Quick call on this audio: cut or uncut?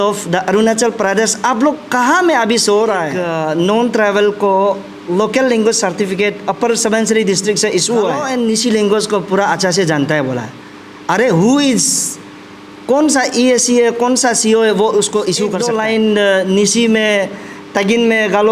cut